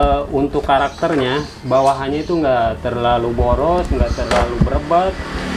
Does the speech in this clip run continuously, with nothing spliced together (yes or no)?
yes